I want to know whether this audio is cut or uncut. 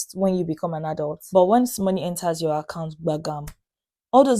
cut